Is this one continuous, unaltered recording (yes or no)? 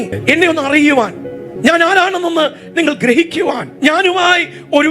yes